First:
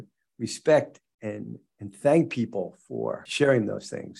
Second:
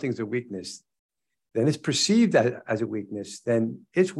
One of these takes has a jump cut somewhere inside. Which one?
first; 1 cut; at 3.2 s

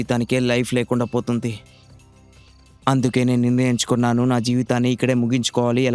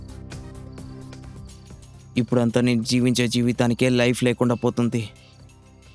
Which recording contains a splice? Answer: second; 1 cut; at 2.0 s

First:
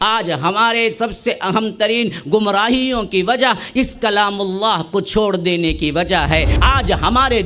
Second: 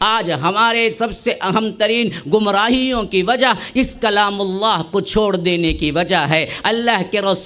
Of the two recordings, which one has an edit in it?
first; 1 cut; at 6.5 s

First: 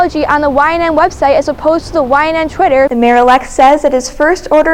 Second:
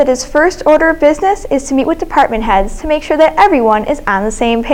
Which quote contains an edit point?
first; 1 cut; at 2.9 s

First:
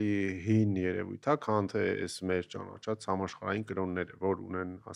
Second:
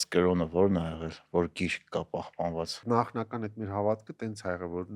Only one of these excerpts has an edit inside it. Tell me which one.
second; 1 cut; at 2.8 s

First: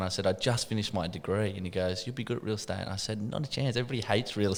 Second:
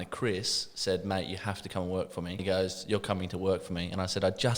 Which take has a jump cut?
second; 1 cut; at 2.4 s

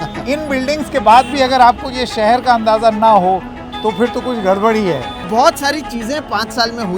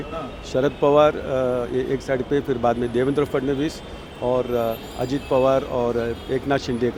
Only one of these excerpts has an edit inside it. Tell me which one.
first; 1 cut; at 5.1 s

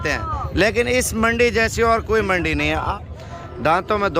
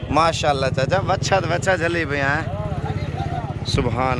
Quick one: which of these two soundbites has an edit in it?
first; 1 cut; at 2.9 s

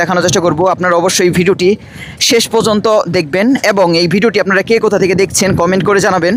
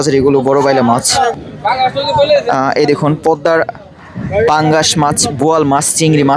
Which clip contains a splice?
second; 1 cut; at 1.4 s

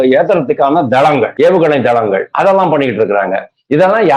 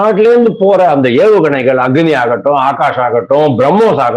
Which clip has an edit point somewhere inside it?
first; 2 cuts; at 1.3 s, 2.3 s

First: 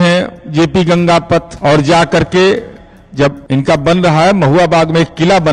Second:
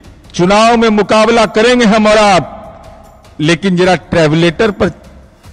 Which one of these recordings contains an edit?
first; 2 cuts; at 1.5 s, 3.4 s

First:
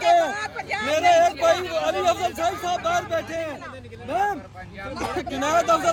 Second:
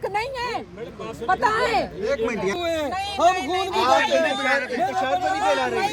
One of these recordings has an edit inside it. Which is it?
second; 1 cut; at 2.5 s

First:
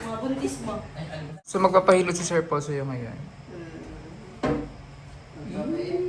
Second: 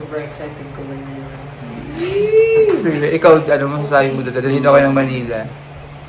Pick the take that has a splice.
first; 1 cut; at 1.4 s

